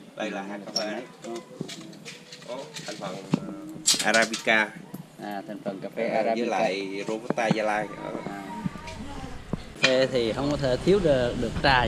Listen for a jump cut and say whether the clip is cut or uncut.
cut